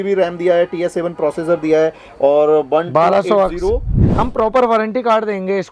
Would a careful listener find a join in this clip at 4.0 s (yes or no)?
yes